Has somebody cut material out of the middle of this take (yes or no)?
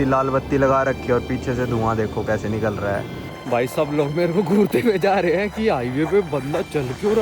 yes